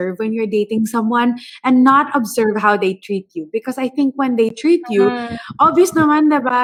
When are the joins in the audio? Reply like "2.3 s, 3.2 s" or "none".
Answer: none

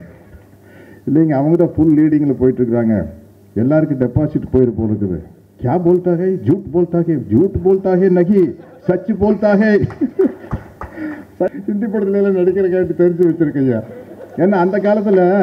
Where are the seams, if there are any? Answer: 11.6 s

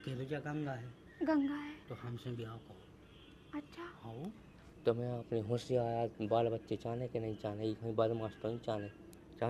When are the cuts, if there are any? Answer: none

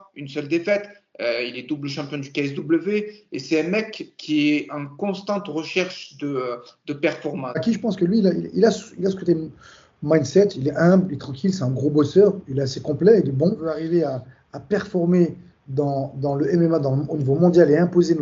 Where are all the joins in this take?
7.6 s, 13.7 s

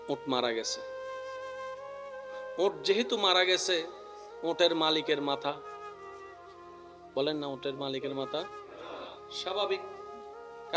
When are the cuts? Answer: none

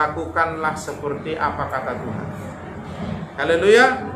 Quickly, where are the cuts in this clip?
none

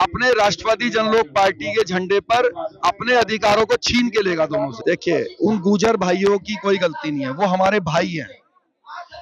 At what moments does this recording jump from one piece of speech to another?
4.8 s

